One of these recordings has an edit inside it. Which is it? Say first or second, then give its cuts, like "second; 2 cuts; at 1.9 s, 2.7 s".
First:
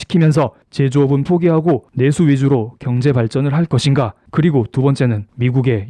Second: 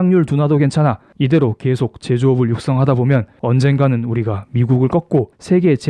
first; 1 cut; at 4.2 s